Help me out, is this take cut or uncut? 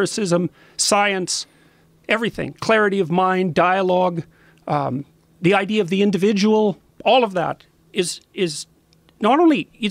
uncut